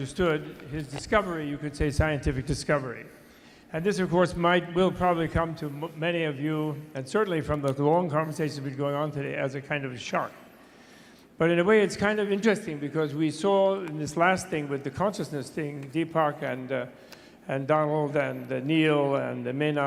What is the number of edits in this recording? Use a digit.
0